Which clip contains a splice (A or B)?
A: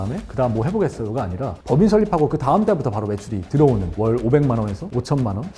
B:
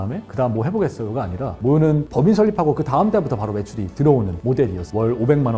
A